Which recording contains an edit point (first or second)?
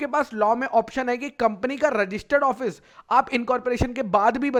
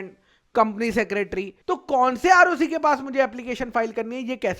second